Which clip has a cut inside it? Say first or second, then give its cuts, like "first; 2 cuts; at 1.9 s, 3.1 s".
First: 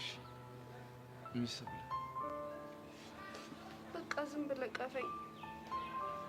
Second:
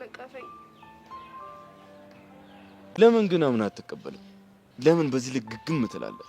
second; 1 cut; at 3.0 s